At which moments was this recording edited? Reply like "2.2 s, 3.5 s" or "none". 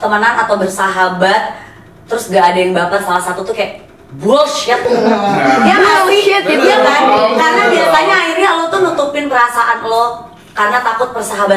none